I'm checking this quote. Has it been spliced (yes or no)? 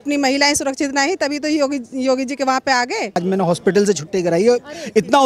yes